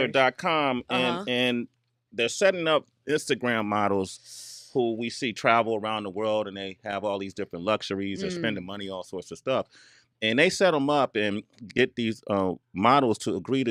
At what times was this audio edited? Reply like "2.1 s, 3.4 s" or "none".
none